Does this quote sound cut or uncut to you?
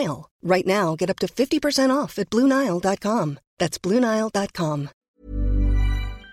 cut